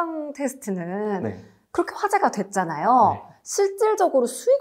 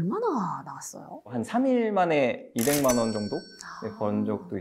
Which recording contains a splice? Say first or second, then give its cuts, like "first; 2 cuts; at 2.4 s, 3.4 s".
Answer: second; 1 cut; at 1.4 s